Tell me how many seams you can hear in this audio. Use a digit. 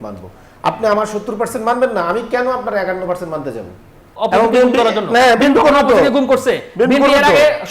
1